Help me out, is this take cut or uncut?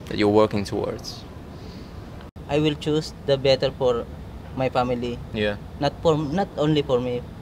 cut